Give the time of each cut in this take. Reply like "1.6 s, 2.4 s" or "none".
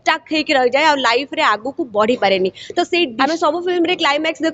3.1 s